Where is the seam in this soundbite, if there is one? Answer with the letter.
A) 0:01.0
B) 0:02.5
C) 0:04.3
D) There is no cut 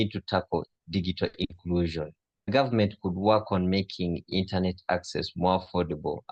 B